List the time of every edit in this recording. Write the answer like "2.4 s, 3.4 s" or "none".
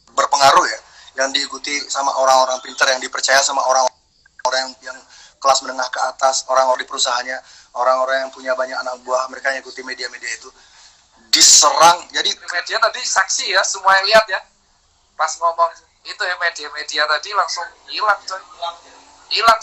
12.4 s

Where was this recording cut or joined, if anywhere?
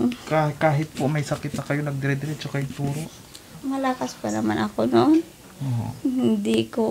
3.5 s

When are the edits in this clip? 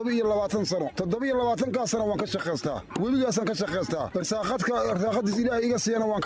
none

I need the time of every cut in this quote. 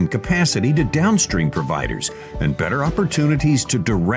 2.1 s

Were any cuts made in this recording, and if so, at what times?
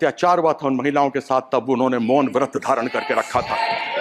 none

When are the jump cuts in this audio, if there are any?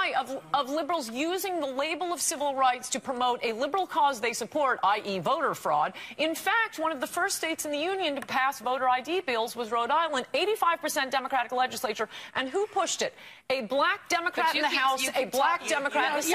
none

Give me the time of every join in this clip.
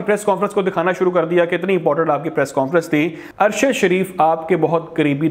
3.2 s

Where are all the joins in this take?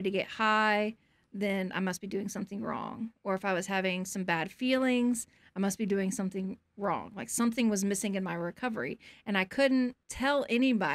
10.0 s

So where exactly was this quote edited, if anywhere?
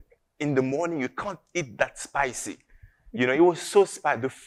none

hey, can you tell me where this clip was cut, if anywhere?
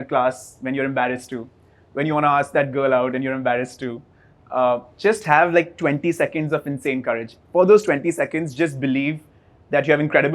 none

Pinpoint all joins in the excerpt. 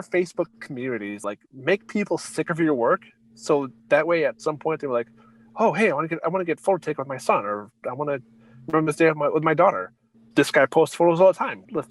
1.2 s

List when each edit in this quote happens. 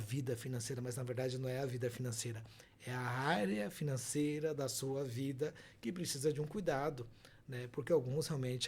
none

